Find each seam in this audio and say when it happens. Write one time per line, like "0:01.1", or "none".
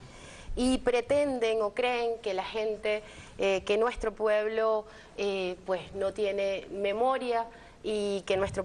0:03.2